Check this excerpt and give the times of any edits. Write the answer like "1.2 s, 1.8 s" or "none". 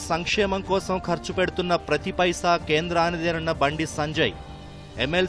none

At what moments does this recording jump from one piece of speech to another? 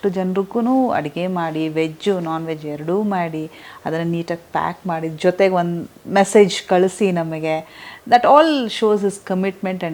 none

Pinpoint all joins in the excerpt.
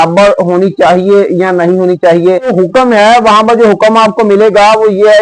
2.5 s

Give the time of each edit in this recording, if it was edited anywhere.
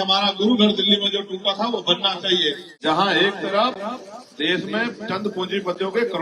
2.7 s

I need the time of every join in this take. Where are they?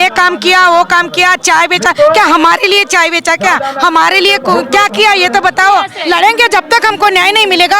5.9 s

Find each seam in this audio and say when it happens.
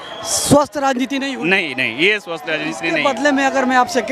none

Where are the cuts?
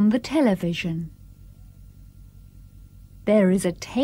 1.2 s, 3.3 s

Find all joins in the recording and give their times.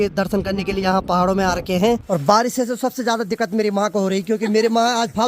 2.0 s

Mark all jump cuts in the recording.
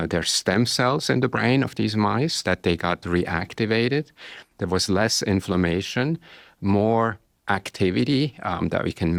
none

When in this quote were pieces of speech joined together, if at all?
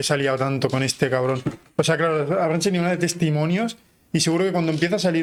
none

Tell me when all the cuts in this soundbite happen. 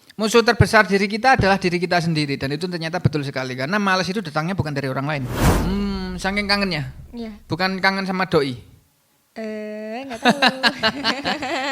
5.4 s

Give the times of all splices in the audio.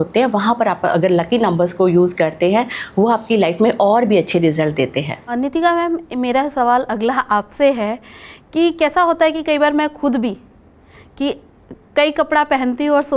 none

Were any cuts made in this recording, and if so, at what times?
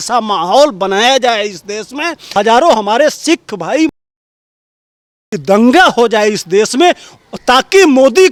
none

